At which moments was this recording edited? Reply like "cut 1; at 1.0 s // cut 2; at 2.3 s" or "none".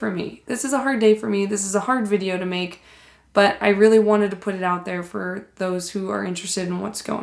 none